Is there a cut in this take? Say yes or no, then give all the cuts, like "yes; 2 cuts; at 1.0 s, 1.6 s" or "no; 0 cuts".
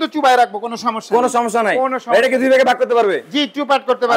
no; 0 cuts